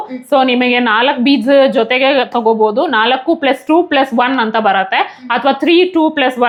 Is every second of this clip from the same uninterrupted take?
yes; 0 cuts

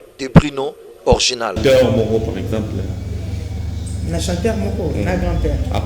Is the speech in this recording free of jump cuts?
no; 1 cut; at 1.6 s

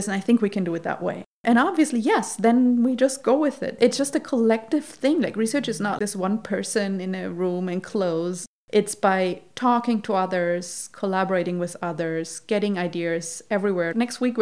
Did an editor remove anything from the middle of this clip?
yes; 1 cut; at 3.7 s

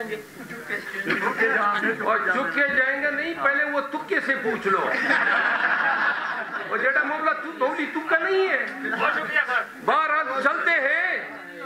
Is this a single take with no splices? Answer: yes; 0 cuts

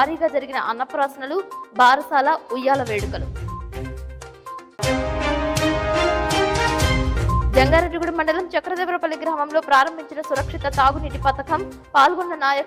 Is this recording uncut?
yes; 0 cuts

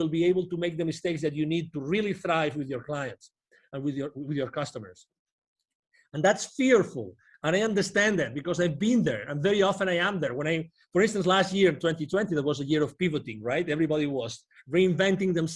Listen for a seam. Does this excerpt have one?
no; 0 cuts

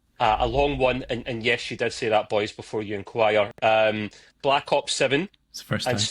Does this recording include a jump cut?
no; 0 cuts

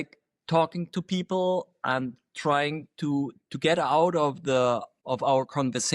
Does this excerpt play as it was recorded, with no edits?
no; 1 cut; at 4.9 s

